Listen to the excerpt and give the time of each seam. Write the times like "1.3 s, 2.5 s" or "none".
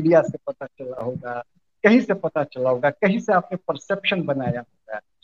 none